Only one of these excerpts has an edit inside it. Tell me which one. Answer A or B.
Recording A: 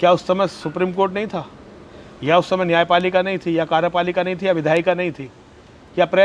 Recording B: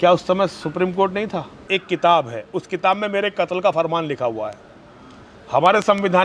B